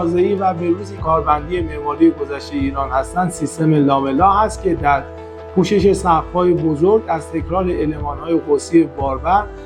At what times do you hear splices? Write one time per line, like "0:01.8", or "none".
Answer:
0:01.0